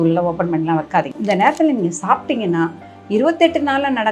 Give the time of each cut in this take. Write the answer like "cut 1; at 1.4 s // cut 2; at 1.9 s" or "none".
cut 1; at 1.1 s